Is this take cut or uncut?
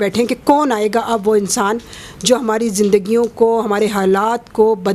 uncut